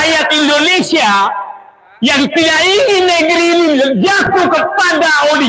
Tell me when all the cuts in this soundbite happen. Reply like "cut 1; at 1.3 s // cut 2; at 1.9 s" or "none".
none